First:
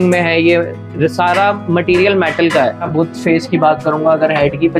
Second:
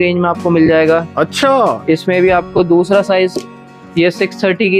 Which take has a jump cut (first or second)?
first